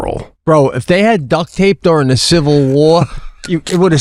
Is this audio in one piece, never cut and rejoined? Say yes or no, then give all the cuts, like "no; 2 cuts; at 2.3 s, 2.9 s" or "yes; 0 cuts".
yes; 0 cuts